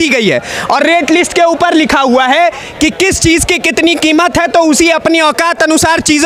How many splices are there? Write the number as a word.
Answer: zero